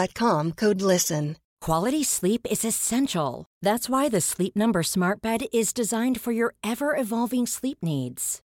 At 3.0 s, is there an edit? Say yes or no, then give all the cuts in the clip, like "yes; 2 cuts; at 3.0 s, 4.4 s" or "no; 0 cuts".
no; 1 cut; at 1.5 s